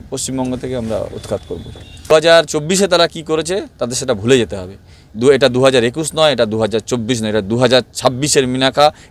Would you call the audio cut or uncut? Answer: cut